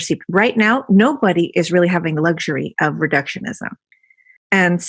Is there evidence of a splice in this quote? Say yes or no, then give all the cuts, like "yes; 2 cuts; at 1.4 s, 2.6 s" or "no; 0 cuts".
no; 0 cuts